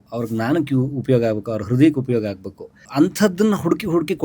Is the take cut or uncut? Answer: cut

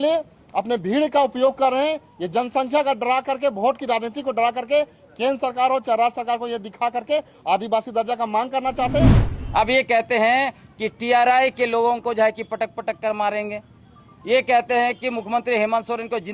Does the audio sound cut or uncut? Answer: cut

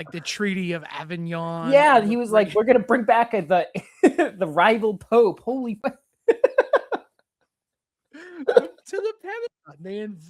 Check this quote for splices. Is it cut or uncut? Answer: cut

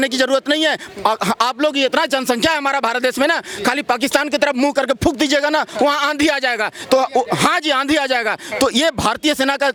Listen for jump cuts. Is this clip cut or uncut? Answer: uncut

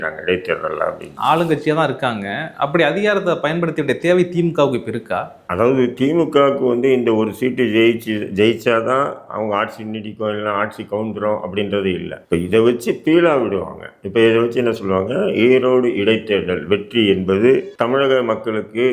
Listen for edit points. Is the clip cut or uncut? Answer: uncut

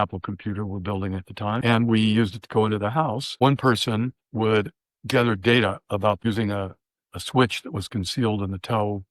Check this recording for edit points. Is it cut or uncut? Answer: cut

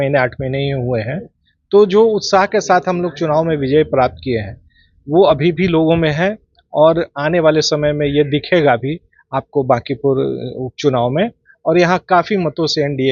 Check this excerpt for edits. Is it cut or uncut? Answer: uncut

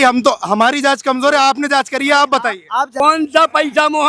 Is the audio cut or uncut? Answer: cut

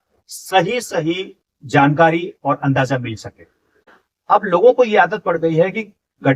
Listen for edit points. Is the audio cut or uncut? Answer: cut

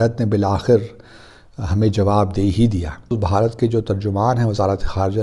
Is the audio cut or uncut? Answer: cut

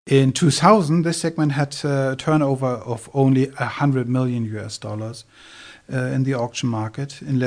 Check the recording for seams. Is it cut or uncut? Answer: uncut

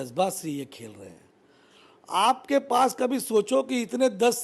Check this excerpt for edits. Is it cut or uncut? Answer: uncut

